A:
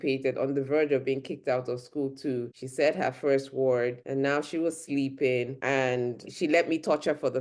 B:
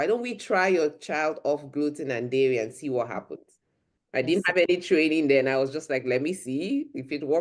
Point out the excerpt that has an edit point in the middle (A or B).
A